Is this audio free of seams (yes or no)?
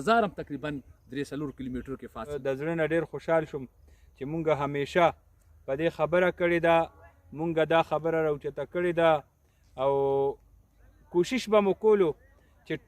no